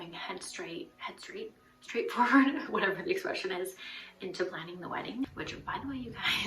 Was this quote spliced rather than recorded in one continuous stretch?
yes; 1 cut; at 5.2 s

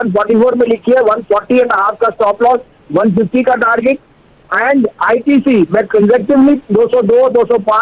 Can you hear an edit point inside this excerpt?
no; 0 cuts

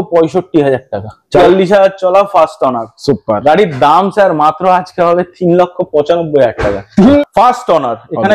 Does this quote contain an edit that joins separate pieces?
yes; 2 cuts; at 1.4 s, 7.2 s

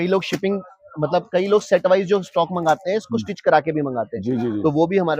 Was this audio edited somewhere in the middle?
no; 0 cuts

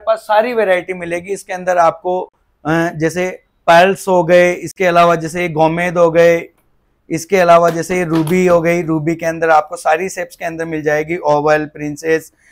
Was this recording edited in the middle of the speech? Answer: no; 0 cuts

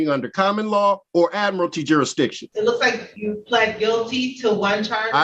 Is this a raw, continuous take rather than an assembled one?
no; 3 cuts; at 1.0 s, 2.4 s, 3.1 s

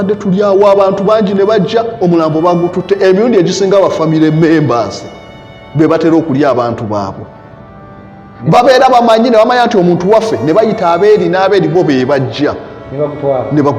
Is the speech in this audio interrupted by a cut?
no; 0 cuts

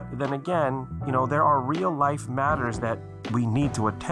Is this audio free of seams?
no; 1 cut; at 0.9 s

